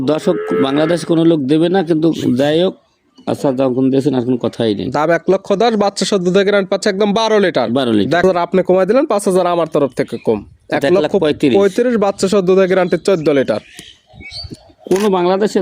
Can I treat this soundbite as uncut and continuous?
no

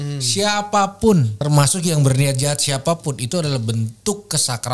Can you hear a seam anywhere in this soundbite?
yes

